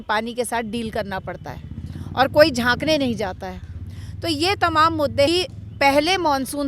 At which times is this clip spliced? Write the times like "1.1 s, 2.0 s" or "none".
5.3 s